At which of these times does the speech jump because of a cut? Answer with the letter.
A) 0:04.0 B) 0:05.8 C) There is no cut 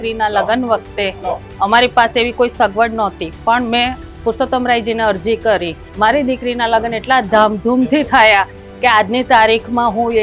B